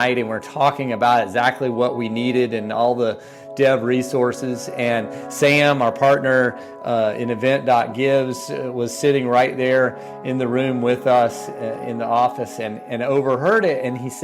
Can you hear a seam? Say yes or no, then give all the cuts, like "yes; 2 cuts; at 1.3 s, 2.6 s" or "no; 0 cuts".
no; 0 cuts